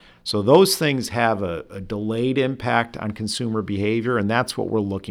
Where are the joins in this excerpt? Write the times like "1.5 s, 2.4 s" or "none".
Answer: none